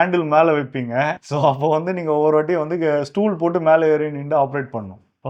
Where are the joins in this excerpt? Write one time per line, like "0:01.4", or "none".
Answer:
0:01.2